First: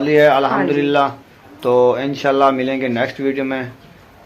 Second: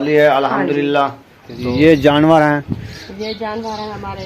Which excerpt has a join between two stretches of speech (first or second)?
second